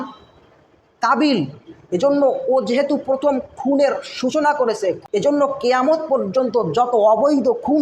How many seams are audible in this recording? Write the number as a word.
one